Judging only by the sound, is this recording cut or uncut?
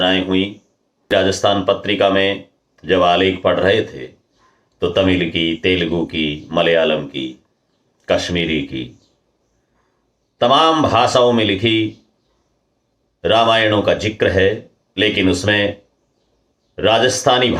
cut